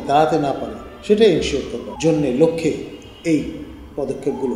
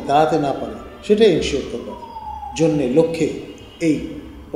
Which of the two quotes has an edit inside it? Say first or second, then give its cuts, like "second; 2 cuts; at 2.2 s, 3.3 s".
first; 1 cut; at 1.8 s